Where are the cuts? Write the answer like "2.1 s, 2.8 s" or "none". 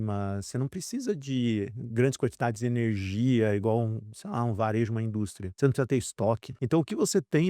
5.4 s, 6.5 s